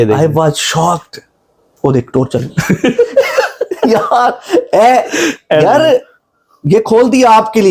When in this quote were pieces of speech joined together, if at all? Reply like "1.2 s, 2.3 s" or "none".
none